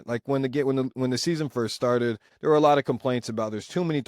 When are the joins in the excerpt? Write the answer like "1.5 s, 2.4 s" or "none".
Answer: 2.3 s